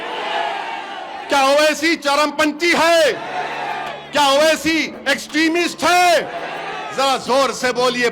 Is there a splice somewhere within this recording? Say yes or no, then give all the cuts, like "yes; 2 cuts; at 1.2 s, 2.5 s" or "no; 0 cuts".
no; 0 cuts